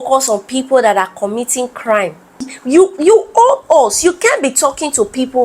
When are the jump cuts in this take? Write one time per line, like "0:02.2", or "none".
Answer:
0:02.5